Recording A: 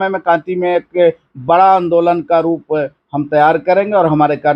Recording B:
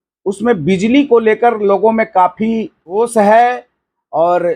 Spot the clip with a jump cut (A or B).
B